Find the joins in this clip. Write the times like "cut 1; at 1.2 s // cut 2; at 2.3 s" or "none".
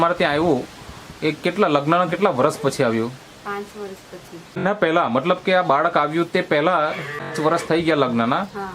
cut 1; at 4.6 s // cut 2; at 7.3 s